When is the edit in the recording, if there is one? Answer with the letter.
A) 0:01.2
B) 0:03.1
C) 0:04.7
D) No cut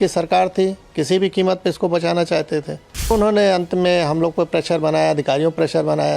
B